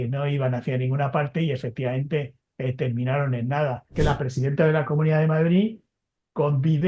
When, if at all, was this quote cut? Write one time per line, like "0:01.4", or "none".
0:03.9